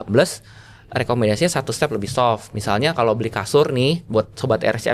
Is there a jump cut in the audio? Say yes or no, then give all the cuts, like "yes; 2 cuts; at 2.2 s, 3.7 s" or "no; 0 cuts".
no; 0 cuts